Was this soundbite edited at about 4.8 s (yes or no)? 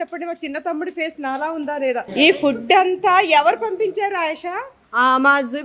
yes